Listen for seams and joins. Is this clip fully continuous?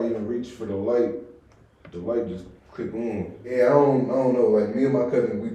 no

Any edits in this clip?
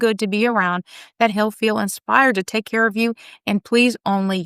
yes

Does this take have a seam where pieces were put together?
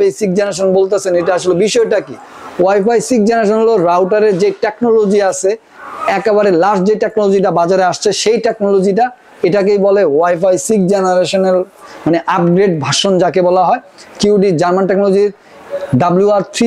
no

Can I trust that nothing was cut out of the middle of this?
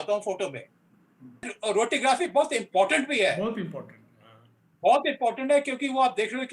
no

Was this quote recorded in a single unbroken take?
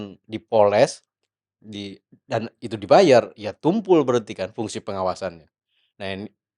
yes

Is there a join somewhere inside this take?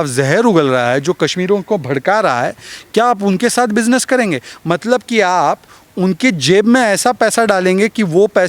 no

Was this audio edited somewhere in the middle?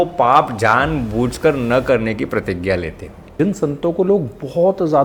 yes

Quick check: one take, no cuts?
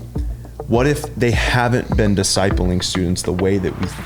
yes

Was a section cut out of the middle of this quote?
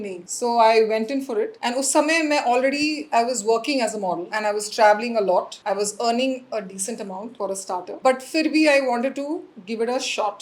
no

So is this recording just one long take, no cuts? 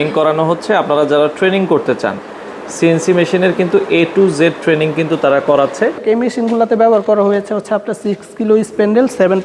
no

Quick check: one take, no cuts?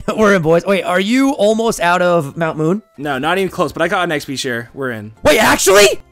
no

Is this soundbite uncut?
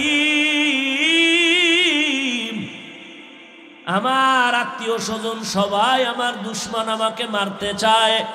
yes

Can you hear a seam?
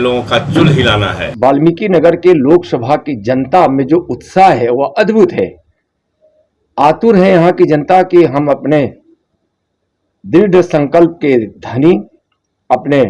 yes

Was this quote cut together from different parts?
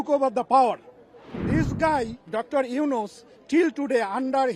yes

